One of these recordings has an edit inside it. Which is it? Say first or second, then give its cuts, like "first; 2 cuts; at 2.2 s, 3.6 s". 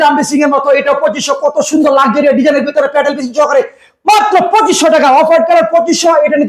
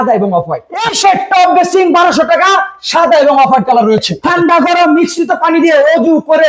second; 2 cuts; at 0.9 s, 4.2 s